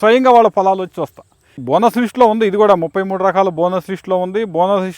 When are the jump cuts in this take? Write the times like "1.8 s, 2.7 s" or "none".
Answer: 1.6 s